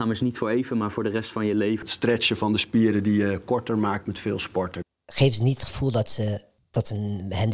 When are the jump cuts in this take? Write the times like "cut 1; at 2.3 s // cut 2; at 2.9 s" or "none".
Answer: cut 1; at 1.8 s // cut 2; at 4.8 s